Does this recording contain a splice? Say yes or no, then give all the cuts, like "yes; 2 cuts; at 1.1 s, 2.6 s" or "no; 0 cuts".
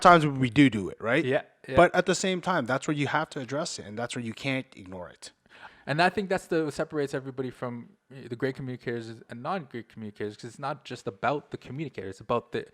yes; 1 cut; at 5.6 s